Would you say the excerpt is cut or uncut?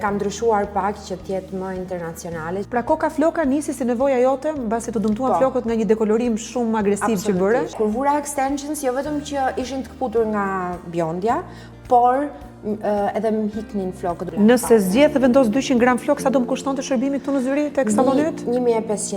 cut